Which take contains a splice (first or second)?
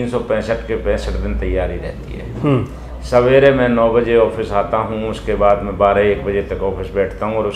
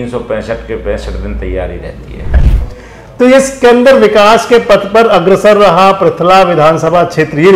second